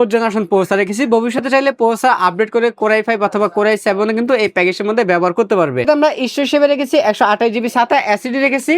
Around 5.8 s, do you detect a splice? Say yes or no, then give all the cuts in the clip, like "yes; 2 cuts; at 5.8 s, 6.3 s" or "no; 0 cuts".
yes; 1 cut; at 5.8 s